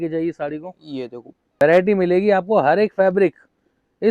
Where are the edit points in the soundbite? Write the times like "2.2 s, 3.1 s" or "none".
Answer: 1.6 s